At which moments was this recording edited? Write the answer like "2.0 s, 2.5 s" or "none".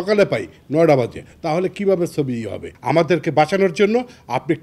2.7 s